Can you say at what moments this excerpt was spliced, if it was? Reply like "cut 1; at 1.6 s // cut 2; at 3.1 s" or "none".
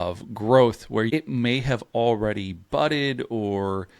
cut 1; at 1.1 s